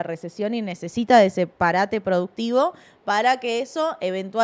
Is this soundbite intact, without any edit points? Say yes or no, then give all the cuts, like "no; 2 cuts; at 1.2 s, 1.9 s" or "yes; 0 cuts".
yes; 0 cuts